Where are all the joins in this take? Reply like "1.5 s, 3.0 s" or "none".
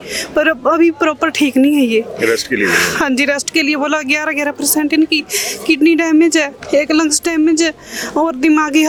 none